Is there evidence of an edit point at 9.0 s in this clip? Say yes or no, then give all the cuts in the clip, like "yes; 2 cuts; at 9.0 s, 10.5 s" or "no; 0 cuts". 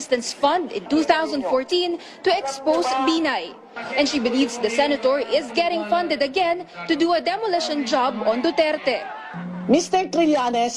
no; 1 cut; at 4.2 s